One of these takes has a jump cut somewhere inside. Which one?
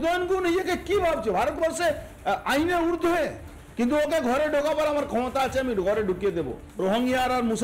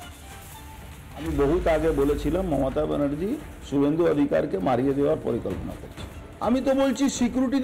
second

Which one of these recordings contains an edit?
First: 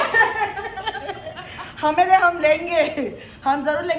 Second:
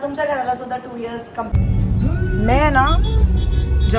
second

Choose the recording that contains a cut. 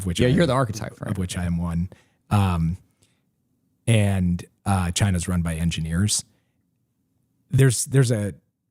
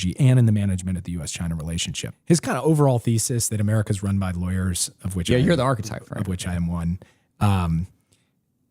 second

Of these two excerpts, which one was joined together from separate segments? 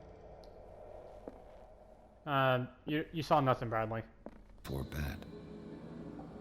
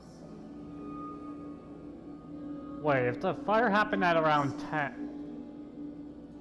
first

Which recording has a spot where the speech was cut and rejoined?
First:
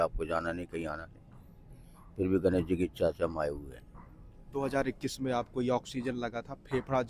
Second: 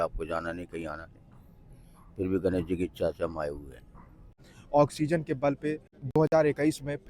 second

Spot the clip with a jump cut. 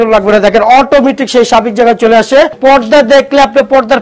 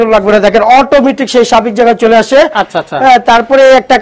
first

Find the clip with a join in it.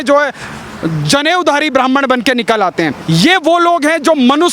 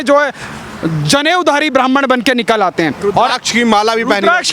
first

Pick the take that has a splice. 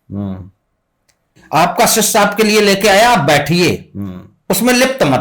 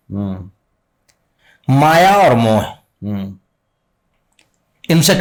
first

